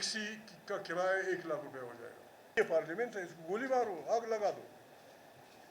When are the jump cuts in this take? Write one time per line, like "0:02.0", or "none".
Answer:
0:02.6